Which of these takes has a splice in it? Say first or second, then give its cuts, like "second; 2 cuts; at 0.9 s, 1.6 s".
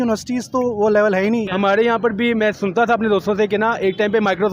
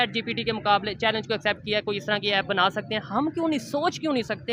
first; 1 cut; at 1.5 s